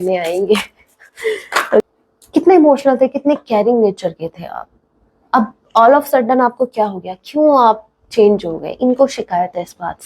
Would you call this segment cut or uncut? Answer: cut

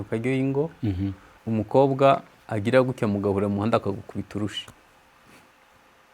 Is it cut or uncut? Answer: cut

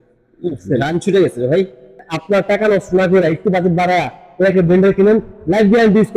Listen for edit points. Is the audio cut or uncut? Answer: cut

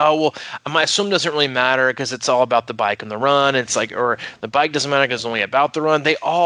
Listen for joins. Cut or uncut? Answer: uncut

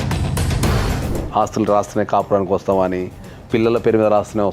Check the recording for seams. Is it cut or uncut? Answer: cut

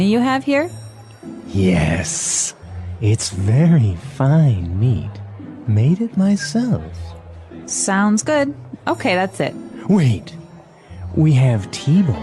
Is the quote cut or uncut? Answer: uncut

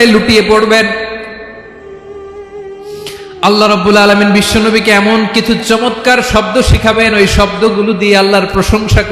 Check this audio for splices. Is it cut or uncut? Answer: cut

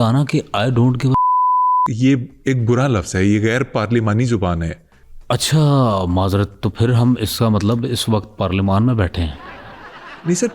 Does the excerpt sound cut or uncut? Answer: cut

